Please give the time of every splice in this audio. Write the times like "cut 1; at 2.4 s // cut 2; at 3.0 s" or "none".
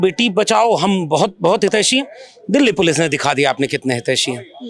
none